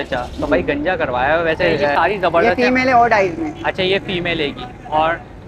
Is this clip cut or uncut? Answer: cut